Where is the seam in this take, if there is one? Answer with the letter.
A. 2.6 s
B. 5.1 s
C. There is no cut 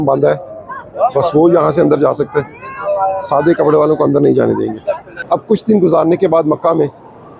B